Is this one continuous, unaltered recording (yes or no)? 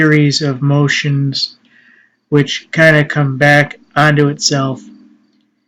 no